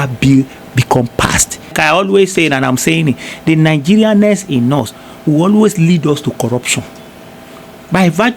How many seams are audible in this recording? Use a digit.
1